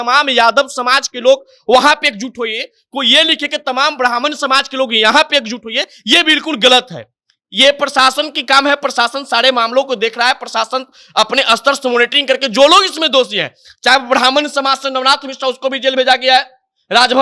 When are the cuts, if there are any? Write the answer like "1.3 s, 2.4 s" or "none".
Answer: none